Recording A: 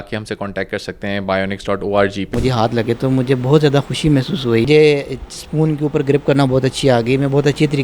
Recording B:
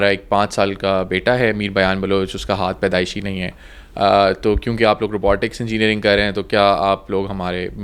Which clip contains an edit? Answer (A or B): A